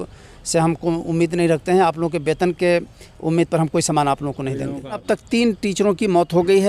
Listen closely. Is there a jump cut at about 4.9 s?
yes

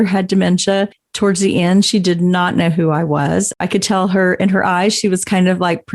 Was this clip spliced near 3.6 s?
yes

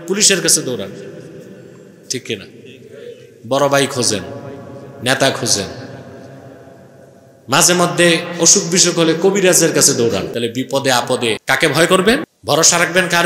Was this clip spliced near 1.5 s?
no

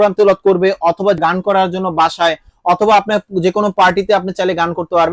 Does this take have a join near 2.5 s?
no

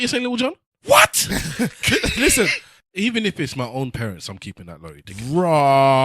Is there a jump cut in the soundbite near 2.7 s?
yes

